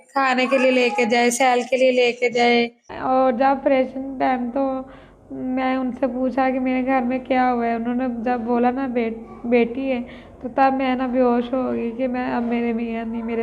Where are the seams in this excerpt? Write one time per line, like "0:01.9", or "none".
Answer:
0:02.8